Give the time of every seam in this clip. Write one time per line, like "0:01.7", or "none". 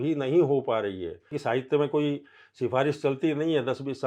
0:01.3